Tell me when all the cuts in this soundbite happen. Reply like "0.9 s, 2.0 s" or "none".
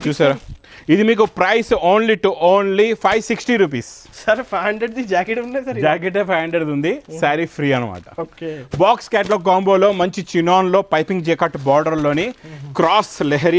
none